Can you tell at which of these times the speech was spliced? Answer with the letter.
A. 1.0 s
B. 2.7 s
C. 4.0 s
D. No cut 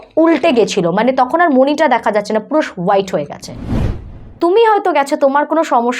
C